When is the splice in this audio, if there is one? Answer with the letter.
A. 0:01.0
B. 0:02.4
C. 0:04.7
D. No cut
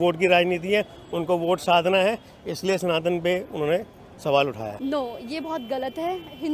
C